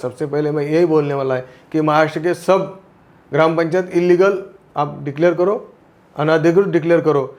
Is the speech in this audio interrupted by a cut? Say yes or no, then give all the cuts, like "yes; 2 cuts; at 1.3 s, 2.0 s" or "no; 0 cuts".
no; 0 cuts